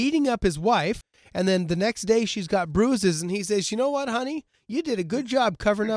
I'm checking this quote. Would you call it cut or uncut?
cut